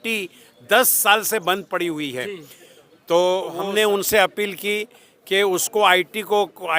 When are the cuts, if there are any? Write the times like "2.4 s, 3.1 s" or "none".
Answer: 3.6 s